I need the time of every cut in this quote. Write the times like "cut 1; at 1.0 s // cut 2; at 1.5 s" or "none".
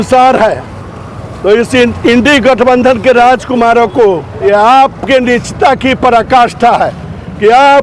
cut 1; at 4.3 s